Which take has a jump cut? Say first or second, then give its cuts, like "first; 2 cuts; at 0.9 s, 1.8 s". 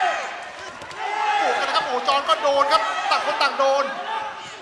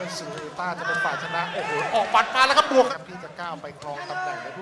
second; 1 cut; at 2.9 s